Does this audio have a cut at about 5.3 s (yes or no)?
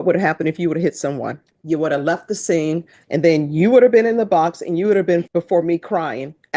yes